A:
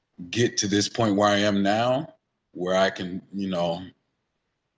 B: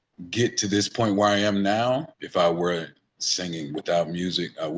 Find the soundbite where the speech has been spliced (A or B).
B